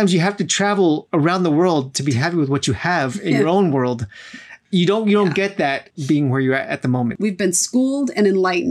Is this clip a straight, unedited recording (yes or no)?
no